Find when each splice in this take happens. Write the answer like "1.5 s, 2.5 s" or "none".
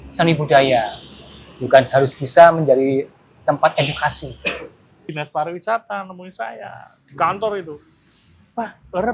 5.1 s